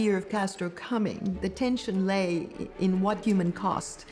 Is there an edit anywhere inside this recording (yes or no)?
yes